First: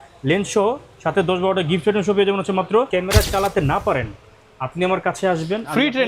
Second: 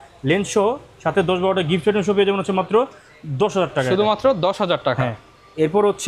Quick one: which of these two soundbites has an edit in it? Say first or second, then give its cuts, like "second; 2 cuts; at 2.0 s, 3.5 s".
first; 1 cut; at 2.9 s